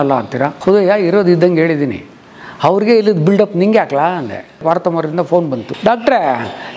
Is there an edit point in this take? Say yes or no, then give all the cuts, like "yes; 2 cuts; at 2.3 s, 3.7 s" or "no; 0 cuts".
yes; 2 cuts; at 4.6 s, 5.7 s